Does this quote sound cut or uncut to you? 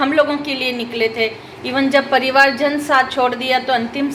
uncut